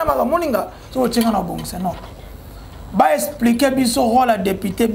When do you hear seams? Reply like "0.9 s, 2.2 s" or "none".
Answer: none